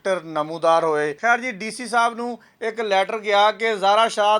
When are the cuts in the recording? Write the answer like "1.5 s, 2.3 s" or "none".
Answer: 1.2 s